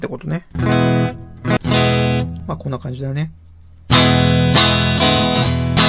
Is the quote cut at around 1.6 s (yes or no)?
yes